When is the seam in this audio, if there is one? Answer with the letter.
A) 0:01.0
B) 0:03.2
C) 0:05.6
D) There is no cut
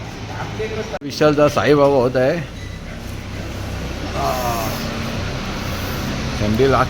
A